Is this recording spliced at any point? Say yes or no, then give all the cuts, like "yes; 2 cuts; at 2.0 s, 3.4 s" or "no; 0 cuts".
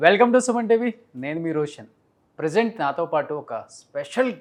no; 0 cuts